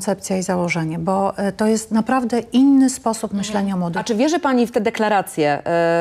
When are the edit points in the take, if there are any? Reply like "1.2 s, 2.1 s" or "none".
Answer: 4.0 s